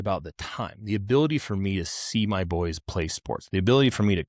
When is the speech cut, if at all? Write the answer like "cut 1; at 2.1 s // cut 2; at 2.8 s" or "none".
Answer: none